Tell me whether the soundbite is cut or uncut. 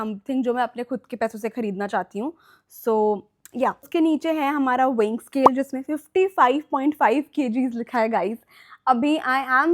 uncut